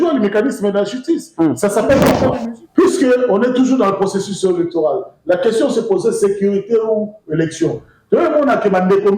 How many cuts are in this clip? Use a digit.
1